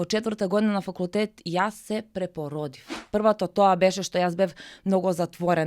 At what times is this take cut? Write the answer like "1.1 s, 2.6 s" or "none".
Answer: 2.9 s